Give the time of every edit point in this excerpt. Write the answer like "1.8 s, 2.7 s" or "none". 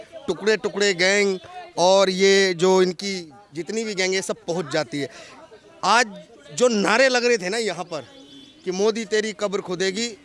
none